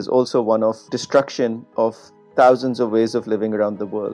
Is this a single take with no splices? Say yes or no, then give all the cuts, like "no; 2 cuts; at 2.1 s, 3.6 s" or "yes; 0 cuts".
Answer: no; 1 cut; at 0.9 s